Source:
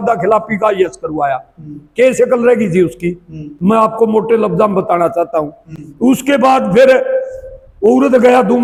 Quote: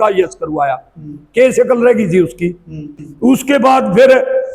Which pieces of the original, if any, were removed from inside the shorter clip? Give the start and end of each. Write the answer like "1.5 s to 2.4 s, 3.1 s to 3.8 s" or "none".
3.4 s to 5.6 s